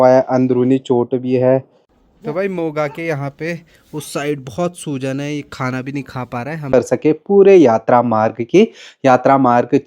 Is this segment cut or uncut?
cut